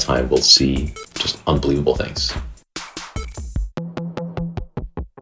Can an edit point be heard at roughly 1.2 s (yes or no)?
no